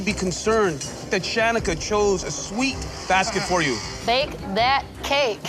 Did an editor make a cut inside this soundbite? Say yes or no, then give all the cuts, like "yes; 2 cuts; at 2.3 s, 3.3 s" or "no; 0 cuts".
yes; 1 cut; at 1.8 s